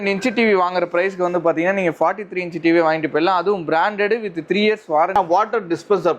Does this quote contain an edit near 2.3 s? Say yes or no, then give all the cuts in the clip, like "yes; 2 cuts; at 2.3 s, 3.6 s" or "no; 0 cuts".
no; 1 cut; at 5.1 s